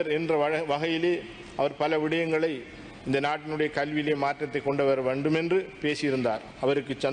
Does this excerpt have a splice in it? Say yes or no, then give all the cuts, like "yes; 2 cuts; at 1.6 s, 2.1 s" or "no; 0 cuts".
no; 0 cuts